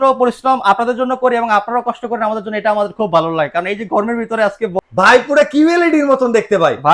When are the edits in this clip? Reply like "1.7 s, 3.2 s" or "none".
4.7 s